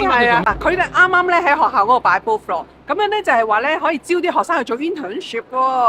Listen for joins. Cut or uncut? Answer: uncut